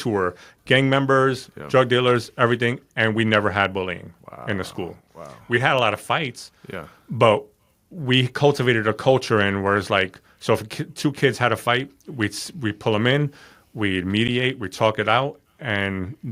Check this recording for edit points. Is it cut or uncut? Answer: uncut